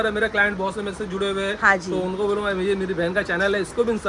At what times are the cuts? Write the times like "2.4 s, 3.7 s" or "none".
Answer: none